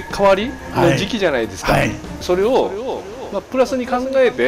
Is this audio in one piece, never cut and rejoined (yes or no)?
no